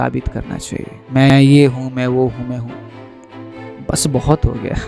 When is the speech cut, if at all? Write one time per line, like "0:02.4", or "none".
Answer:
0:01.3

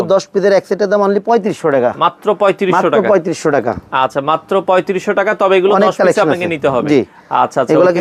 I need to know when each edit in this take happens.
none

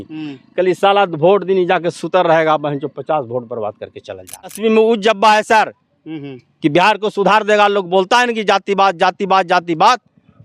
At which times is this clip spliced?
0:04.6

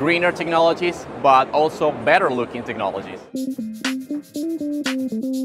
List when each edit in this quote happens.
none

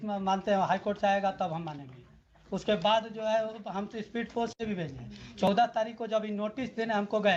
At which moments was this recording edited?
none

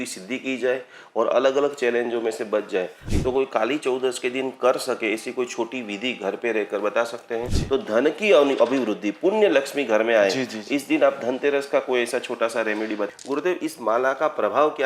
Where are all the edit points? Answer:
0:03.0
0:07.5
0:13.1

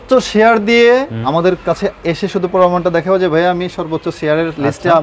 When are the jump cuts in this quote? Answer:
0:01.2

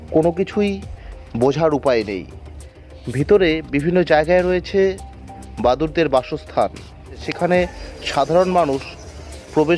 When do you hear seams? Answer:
0:07.3

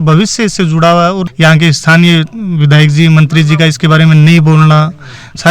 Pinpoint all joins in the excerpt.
0:01.2

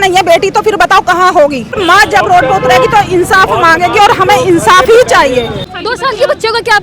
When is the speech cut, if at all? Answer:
0:01.8
0:05.5

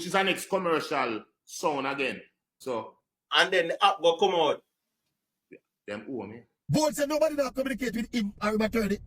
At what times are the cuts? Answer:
0:02.5
0:06.5

